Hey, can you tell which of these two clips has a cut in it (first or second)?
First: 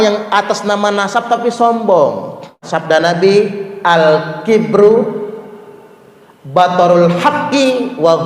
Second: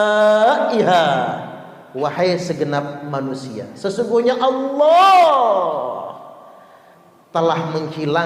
first